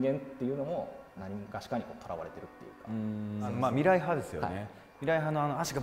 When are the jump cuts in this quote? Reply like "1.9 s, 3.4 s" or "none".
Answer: 1.1 s, 3.5 s

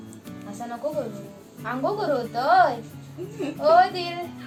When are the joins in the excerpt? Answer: none

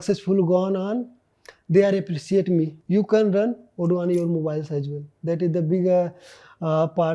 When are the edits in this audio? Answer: 2.8 s

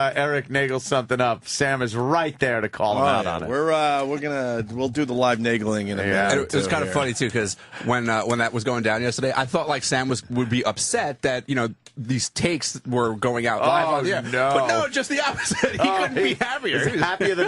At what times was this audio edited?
14.7 s

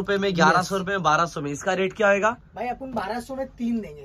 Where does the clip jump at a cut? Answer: none

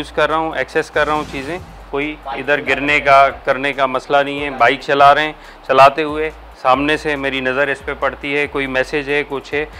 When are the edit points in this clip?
none

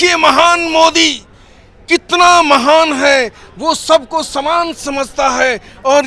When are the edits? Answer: none

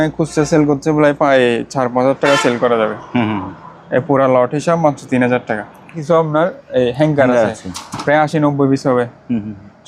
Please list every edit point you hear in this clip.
6.0 s

